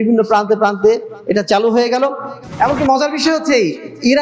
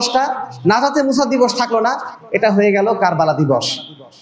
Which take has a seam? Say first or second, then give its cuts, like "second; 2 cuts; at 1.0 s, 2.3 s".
first; 1 cut; at 2.4 s